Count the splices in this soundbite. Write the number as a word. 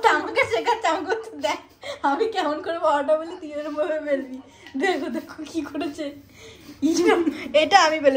zero